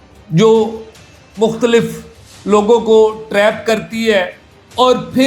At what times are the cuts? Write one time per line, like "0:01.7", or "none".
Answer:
none